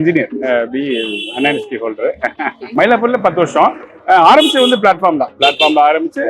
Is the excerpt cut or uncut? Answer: cut